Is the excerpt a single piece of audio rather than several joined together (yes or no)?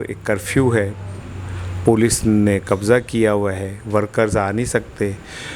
yes